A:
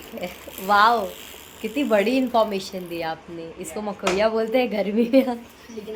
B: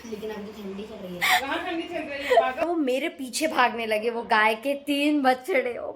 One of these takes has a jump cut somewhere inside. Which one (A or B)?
B